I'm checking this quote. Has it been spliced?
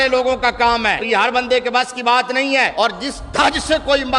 yes; 2 cuts; at 1.0 s, 2.7 s

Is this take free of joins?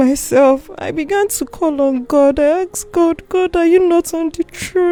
yes; 0 cuts

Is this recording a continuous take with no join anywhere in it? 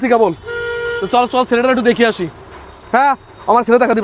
yes; 0 cuts

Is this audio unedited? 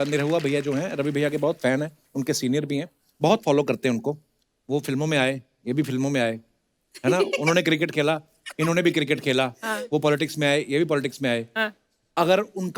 yes; 0 cuts

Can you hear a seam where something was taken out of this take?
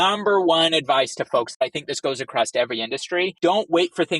yes; 2 cuts; at 1.6 s, 3.3 s

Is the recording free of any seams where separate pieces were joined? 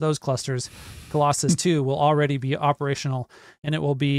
yes; 0 cuts

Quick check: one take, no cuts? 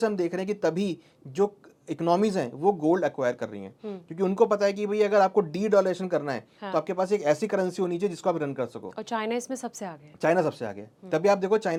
yes; 0 cuts

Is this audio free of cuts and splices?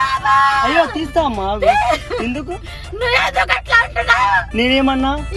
no; 1 cut; at 0.9 s

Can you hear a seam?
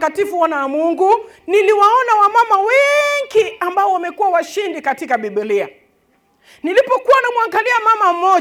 no; 0 cuts

